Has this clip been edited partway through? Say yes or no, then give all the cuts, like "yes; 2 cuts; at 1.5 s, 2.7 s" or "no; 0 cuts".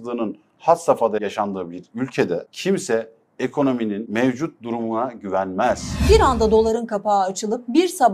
yes; 4 cuts; at 1.2 s, 2.5 s, 4.0 s, 6.0 s